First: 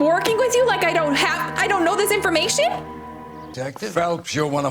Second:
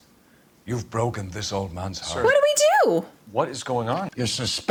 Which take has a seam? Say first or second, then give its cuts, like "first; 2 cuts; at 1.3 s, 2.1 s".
first; 1 cut; at 3.5 s